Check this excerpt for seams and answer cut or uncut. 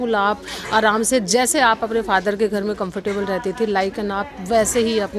uncut